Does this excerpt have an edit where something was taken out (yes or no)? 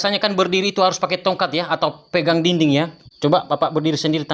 no